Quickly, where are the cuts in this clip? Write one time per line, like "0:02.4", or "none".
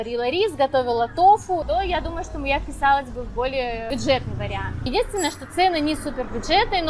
0:01.6
0:03.9
0:04.9